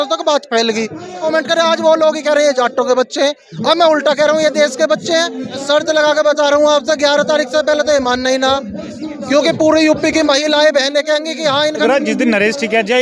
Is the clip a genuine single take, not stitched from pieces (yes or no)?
no